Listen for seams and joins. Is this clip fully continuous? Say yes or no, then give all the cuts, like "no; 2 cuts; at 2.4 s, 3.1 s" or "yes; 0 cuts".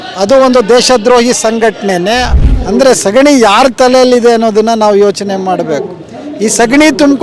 no; 1 cut; at 2.3 s